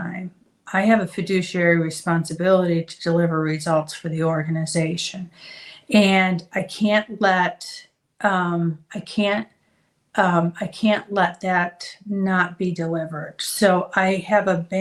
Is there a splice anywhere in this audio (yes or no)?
no